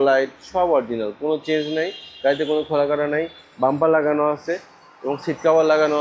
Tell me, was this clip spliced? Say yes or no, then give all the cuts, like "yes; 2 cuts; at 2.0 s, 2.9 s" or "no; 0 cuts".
no; 0 cuts